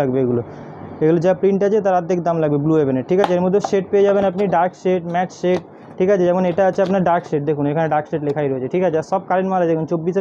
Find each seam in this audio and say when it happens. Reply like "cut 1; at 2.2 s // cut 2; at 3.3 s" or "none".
none